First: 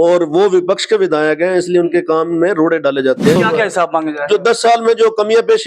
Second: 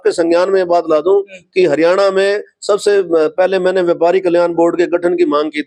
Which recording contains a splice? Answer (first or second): first